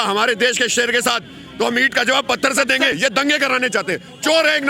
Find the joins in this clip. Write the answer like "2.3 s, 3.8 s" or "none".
3.0 s